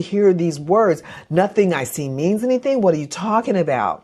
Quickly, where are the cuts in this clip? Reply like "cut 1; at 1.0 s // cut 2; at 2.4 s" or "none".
none